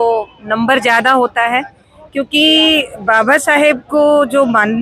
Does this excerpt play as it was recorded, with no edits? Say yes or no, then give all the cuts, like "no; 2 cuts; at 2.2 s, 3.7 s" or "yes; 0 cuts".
yes; 0 cuts